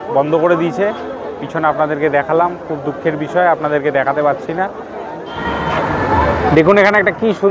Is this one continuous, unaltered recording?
no; 1 cut; at 5.2 s

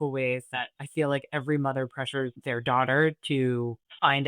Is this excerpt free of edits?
no; 1 cut; at 2.4 s

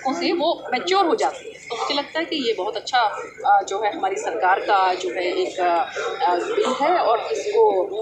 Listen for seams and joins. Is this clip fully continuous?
yes; 0 cuts

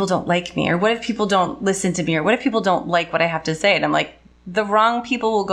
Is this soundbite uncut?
yes; 0 cuts

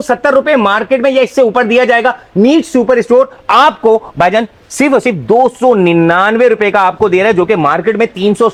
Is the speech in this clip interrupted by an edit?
no; 0 cuts

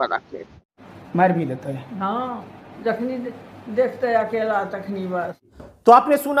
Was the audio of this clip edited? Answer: no; 0 cuts

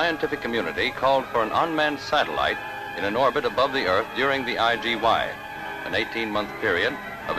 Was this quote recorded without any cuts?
no; 1 cut; at 5.8 s

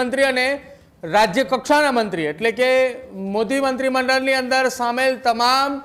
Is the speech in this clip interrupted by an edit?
no; 0 cuts

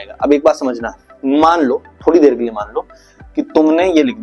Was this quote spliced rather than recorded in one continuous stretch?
no; 0 cuts

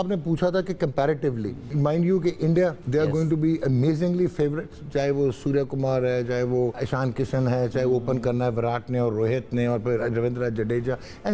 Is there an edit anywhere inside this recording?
yes; 3 cuts; at 1.7 s, 2.8 s, 6.8 s

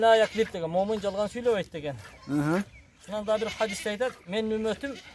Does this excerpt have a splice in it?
no; 0 cuts

